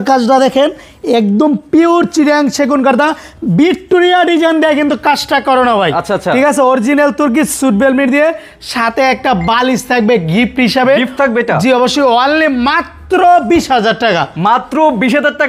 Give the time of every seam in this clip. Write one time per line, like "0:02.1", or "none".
none